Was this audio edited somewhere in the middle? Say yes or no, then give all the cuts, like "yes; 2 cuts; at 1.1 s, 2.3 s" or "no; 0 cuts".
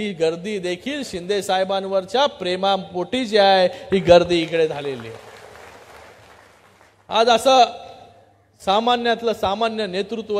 no; 0 cuts